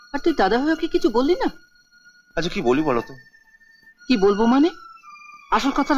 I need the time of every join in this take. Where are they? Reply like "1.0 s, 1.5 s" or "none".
none